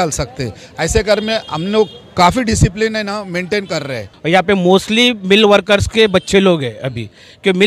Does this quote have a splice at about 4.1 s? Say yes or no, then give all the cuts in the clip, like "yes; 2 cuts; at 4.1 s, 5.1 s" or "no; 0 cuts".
yes; 1 cut; at 4.1 s